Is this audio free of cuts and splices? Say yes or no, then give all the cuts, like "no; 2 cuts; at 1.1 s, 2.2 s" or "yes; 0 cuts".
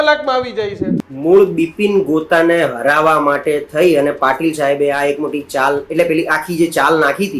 no; 1 cut; at 1.1 s